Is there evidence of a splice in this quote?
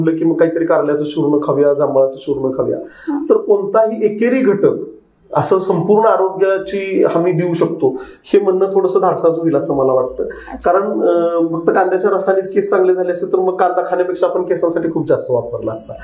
no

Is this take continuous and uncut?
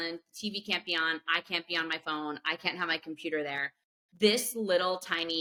yes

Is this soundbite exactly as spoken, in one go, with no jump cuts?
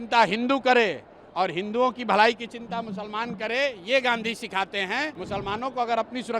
no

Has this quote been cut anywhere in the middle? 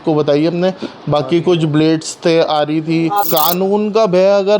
yes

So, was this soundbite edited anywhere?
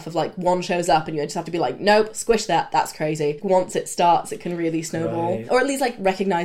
yes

